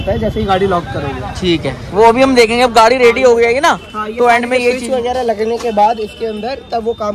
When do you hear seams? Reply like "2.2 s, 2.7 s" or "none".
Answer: none

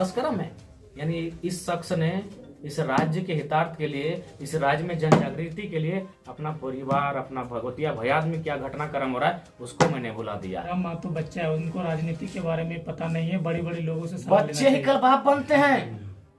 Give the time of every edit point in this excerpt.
10.7 s

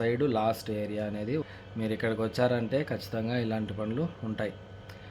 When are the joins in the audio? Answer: 1.4 s

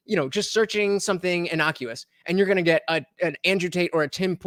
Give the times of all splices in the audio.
none

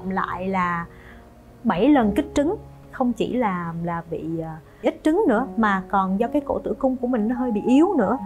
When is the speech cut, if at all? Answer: 2.8 s

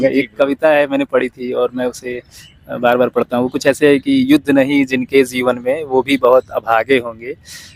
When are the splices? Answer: none

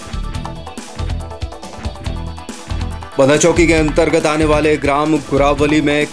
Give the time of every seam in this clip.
3.1 s

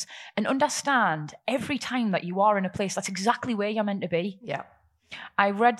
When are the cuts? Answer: none

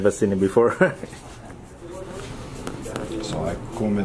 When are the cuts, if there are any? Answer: 1.9 s

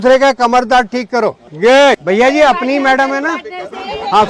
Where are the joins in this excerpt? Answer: none

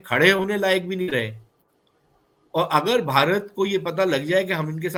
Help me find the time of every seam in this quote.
none

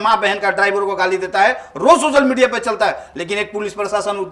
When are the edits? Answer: none

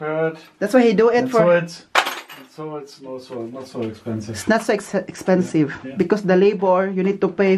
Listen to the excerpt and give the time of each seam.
none

